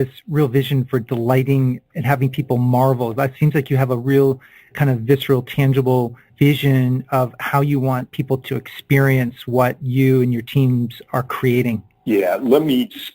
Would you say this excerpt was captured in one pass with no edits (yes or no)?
no